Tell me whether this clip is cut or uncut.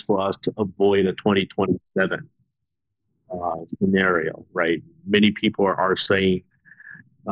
uncut